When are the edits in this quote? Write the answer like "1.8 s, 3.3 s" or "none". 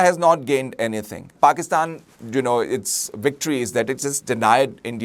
1.3 s